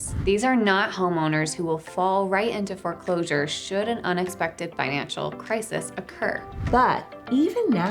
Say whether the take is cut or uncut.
cut